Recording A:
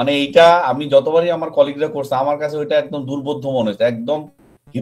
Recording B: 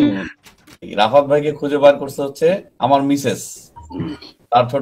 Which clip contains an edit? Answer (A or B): B